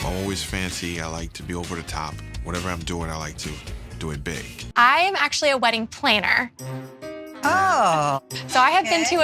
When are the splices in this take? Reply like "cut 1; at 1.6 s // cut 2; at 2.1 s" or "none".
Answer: cut 1; at 4.7 s

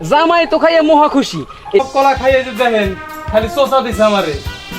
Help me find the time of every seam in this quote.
cut 1; at 1.8 s

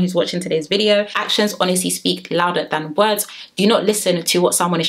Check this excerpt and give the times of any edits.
cut 1; at 1.2 s

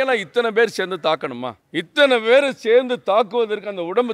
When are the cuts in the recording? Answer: cut 1; at 1.6 s

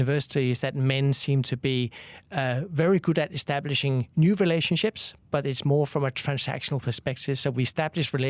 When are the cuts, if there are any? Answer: none

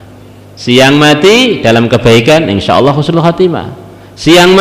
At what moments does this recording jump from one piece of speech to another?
none

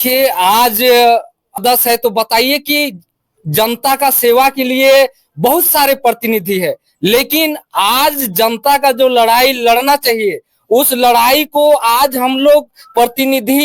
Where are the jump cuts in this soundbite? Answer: cut 1; at 1.6 s

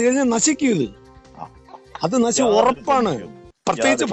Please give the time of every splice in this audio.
none

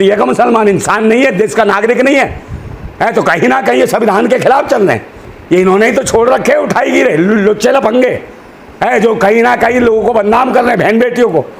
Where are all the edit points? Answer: none

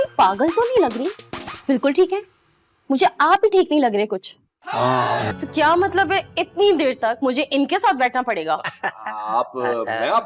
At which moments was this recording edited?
cut 1; at 5.3 s

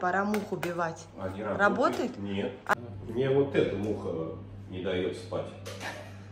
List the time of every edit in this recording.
cut 1; at 2.7 s

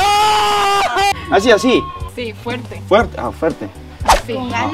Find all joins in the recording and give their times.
cut 1; at 1.1 s

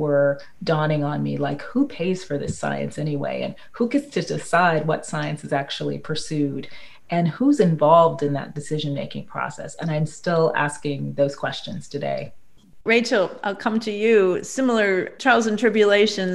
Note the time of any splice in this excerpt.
none

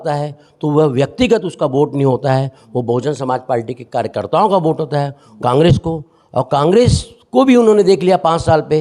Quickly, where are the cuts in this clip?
cut 1; at 5.2 s

